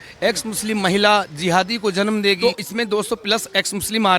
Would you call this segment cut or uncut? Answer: cut